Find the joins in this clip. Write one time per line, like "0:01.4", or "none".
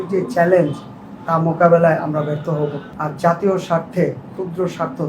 0:02.9